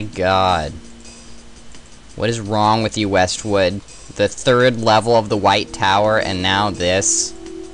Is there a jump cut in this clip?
yes; 1 cut; at 1.1 s

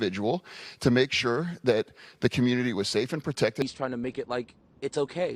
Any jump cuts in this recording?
yes; 1 cut; at 3.6 s

